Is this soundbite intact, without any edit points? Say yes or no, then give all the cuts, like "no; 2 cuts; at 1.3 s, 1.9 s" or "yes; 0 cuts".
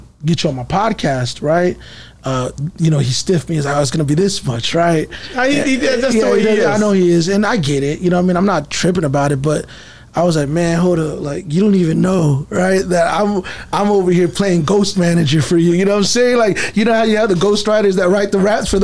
yes; 0 cuts